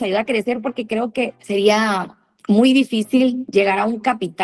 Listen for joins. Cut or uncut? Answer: cut